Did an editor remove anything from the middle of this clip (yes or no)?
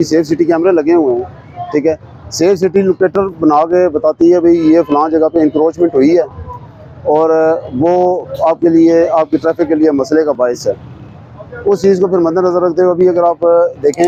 no